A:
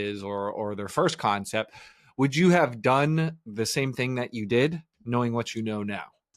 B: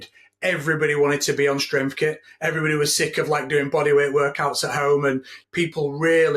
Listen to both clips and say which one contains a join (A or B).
B